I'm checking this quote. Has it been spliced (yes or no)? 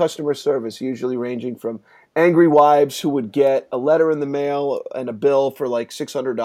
no